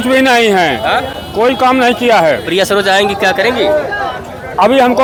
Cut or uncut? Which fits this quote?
uncut